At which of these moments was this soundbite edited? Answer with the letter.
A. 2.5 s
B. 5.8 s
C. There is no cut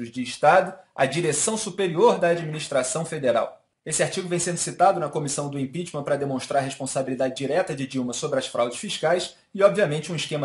B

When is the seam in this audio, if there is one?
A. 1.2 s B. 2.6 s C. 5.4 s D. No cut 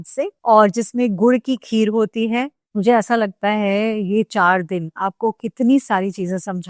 B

